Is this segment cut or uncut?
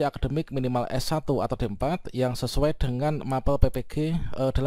uncut